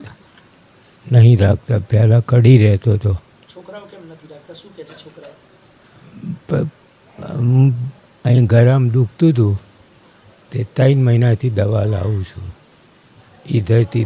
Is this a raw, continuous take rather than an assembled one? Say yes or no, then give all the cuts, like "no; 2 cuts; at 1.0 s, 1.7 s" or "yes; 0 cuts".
yes; 0 cuts